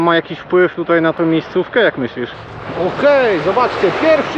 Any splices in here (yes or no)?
yes